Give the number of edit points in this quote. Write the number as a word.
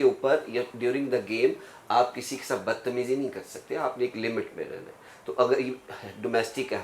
zero